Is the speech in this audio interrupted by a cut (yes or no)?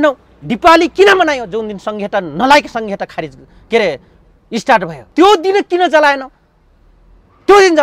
yes